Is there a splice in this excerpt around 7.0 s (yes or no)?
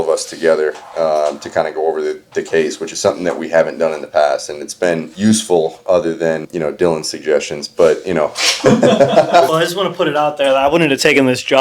no